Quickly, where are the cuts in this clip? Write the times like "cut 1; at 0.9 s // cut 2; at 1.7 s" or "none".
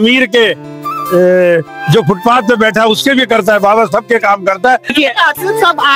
cut 1; at 4.9 s